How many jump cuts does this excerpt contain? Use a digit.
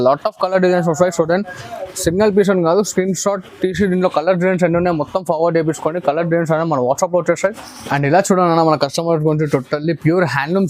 1